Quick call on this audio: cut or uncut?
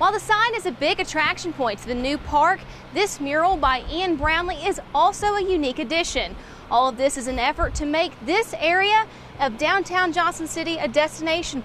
uncut